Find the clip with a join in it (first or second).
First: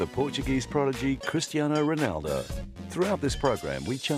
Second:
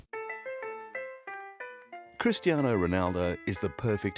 second